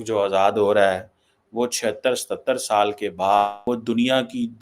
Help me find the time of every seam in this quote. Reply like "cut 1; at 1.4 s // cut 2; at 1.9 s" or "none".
cut 1; at 3.6 s